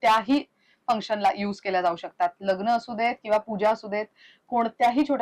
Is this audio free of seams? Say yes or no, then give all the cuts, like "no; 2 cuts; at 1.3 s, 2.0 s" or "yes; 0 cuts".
yes; 0 cuts